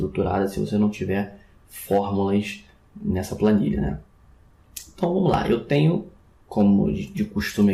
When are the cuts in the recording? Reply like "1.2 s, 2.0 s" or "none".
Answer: 3.5 s

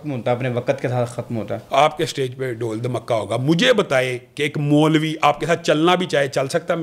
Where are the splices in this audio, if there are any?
1.6 s

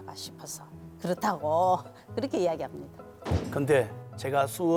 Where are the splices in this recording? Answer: none

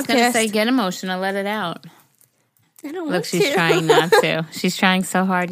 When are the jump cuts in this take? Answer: 2.7 s

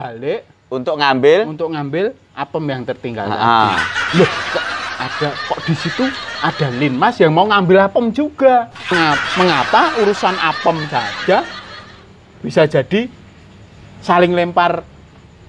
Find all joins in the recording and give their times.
8.9 s

